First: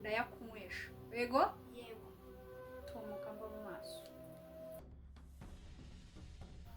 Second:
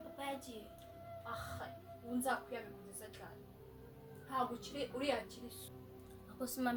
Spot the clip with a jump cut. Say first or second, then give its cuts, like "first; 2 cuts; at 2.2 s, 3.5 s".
first; 1 cut; at 4.8 s